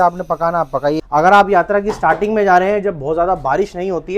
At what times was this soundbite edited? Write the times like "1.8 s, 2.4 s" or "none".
1.0 s